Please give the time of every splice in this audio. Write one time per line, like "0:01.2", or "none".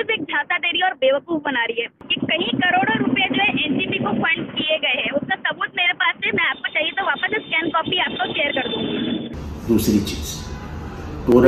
0:02.1
0:09.4